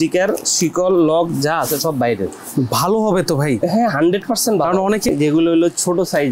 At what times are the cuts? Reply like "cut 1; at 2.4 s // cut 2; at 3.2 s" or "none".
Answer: cut 1; at 5.1 s